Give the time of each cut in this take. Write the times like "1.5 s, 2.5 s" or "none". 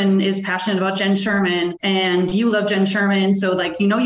1.8 s